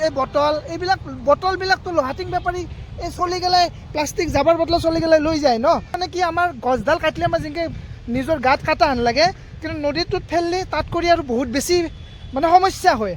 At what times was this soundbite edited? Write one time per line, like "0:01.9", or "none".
0:06.0